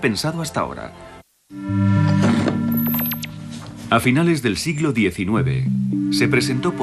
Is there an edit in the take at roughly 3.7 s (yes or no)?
no